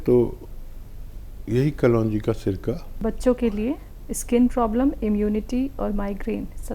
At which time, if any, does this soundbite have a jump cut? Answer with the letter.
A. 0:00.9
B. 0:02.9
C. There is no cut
B